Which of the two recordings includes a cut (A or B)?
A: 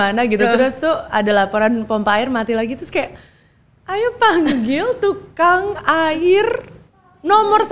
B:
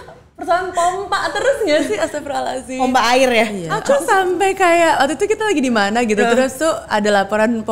B